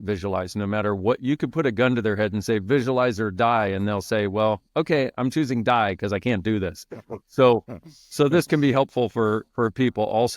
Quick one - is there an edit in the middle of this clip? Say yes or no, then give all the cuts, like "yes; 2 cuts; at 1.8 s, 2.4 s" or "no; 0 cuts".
no; 0 cuts